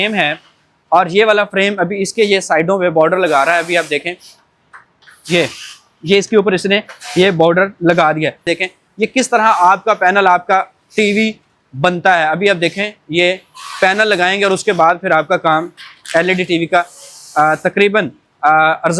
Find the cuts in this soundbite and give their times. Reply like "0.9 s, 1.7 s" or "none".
8.5 s